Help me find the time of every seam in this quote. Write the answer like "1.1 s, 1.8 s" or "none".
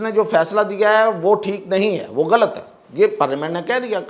none